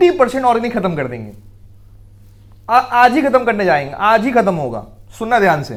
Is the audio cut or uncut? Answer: uncut